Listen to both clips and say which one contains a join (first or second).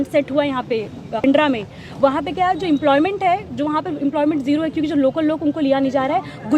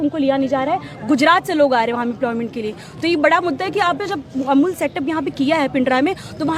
first